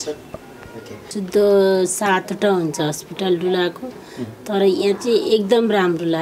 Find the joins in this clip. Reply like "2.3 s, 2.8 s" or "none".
1.1 s